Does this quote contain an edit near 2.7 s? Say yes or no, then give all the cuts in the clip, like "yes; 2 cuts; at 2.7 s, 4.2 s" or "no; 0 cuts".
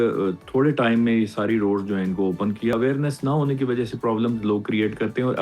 yes; 1 cut; at 2.7 s